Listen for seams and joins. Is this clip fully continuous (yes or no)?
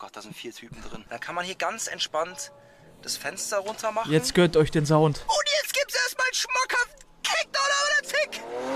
no